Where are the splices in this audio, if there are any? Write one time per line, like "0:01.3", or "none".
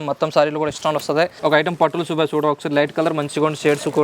0:01.3